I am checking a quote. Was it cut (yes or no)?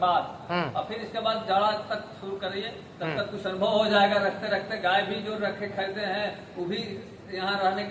no